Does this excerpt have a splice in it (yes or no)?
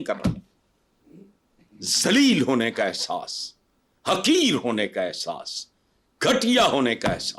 no